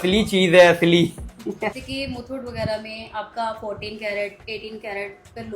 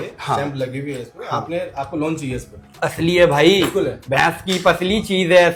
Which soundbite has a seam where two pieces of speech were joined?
first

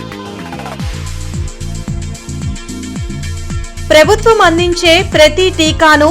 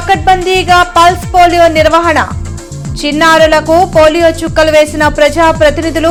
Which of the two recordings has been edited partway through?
first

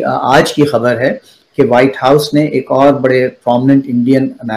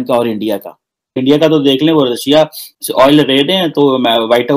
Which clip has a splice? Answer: second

